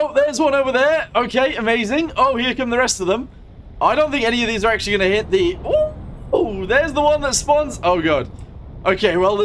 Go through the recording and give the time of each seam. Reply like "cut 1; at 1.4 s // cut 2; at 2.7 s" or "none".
none

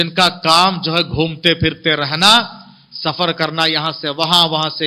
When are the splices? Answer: none

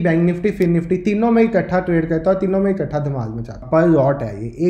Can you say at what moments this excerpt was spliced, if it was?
cut 1; at 3.5 s

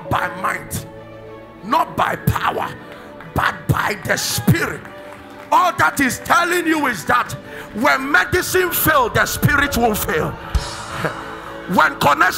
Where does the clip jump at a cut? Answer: none

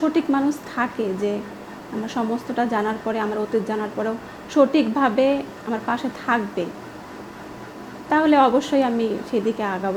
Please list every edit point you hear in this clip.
none

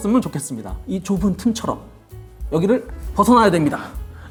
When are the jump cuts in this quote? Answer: none

